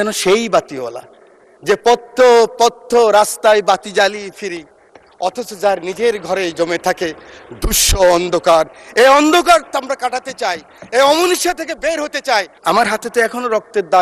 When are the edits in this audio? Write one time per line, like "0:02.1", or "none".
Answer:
0:12.5